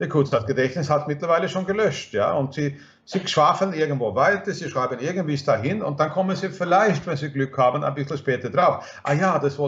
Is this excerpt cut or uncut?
uncut